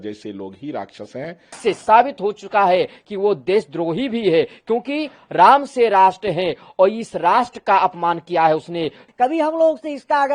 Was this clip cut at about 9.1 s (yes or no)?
yes